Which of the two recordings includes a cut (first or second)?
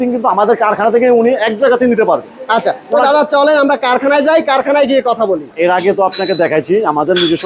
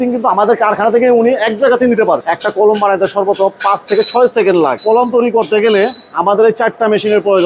second